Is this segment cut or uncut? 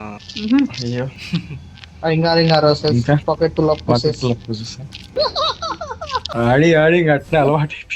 cut